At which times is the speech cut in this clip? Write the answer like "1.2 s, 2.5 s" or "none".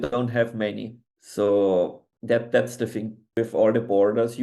3.3 s

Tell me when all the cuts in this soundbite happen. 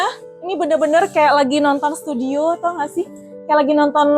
none

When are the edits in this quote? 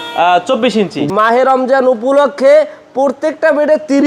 1.1 s

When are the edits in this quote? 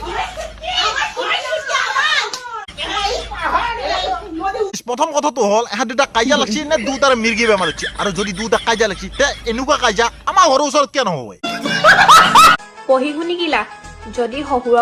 2.6 s, 12.5 s

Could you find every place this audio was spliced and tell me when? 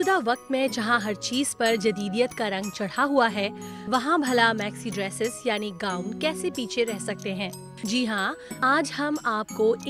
none

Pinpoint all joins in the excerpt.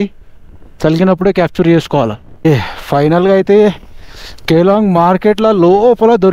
2.5 s

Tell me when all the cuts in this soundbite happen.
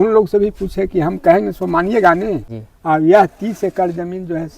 2.5 s

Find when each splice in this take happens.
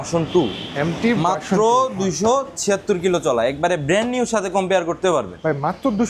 none

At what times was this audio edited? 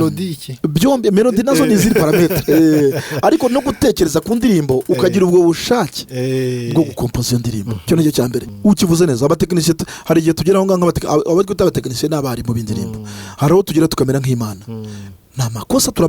8.5 s

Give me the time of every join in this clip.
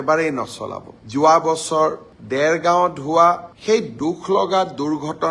0.9 s

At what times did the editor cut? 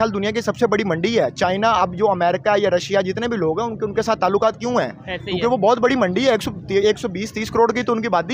none

